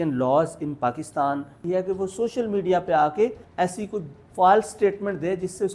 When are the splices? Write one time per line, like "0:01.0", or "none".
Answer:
0:01.5
0:03.4